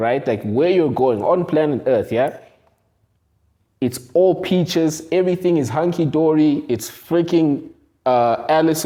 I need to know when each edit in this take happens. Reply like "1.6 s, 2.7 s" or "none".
none